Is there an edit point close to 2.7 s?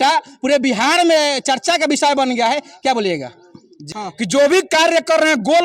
no; 1 cut; at 3.9 s

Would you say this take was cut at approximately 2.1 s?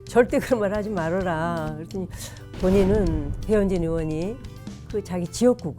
no; 1 cut; at 3.3 s

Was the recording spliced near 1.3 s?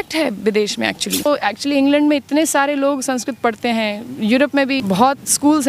yes; 2 cuts; at 1.3 s, 4.8 s

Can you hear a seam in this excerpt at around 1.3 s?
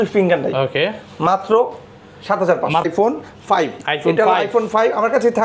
no; 1 cut; at 2.9 s

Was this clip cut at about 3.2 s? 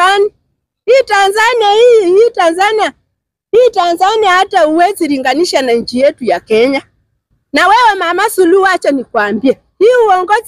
no; 1 cut; at 7.3 s

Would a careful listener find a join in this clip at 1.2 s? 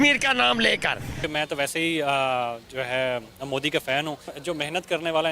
yes; 2 cuts; at 1.2 s, 4.3 s

